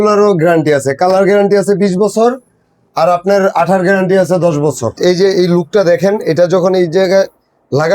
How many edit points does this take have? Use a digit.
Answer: 1